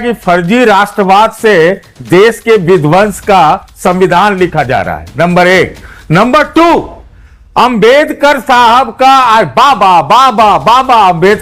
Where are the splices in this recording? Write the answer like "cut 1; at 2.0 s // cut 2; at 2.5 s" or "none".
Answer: none